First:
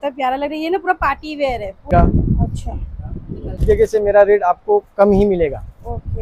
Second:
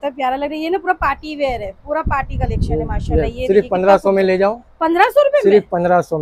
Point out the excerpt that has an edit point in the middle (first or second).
first